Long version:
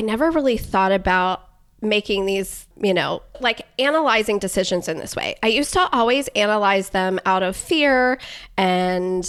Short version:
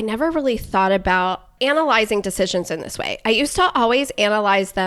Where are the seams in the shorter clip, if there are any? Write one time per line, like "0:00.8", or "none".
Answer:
0:01.5